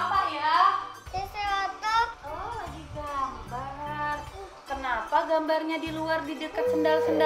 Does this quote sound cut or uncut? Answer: cut